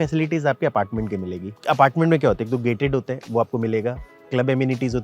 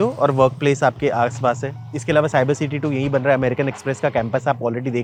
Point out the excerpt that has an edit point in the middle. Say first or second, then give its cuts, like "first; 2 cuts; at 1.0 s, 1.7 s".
first; 1 cut; at 1.4 s